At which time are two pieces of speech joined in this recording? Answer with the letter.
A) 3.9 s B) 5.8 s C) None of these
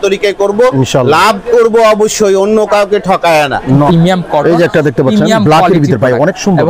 A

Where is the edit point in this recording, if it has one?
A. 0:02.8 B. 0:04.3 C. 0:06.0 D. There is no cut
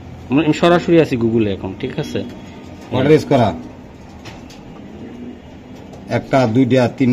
D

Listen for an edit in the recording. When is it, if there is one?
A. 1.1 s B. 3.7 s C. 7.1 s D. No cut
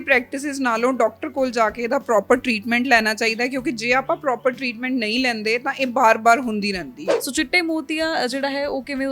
C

